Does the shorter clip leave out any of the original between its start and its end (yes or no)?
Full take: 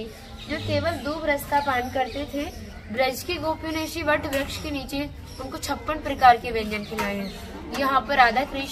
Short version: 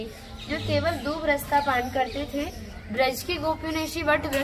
no